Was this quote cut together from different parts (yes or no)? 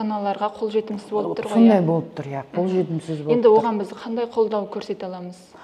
no